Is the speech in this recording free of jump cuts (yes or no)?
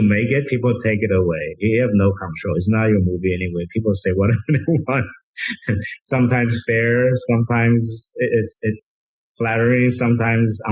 yes